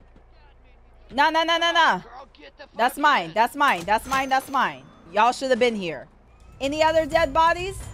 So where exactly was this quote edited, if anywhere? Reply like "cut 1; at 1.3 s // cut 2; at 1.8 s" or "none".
cut 1; at 1.1 s

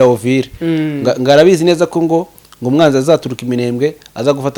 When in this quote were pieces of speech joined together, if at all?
none

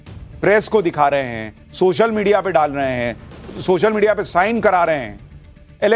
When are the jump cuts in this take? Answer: none

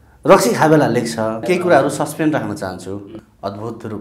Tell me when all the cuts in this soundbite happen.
cut 1; at 1.4 s // cut 2; at 3.1 s

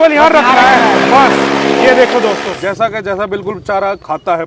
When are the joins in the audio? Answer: cut 1; at 2.6 s

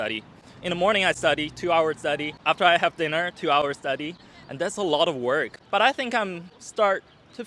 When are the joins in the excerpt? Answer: cut 1; at 2.4 s // cut 2; at 5.6 s

